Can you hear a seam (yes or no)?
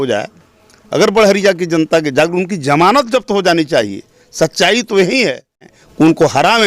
yes